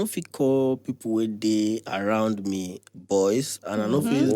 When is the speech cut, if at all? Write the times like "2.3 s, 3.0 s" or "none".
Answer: none